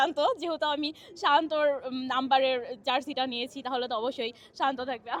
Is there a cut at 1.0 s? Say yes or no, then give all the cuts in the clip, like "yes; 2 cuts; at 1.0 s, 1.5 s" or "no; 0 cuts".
no; 0 cuts